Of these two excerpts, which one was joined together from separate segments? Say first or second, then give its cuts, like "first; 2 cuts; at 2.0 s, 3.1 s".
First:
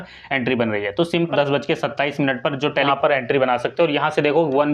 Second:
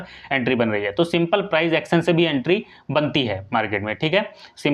first; 2 cuts; at 1.3 s, 2.8 s